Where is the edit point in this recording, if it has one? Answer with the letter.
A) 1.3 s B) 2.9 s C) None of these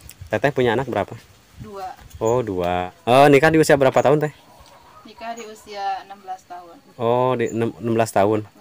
B